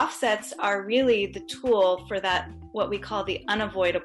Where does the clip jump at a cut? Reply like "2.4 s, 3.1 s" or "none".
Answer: none